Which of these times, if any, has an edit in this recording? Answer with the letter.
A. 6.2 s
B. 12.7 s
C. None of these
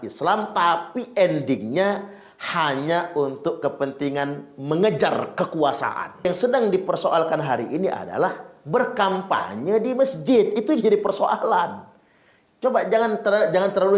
A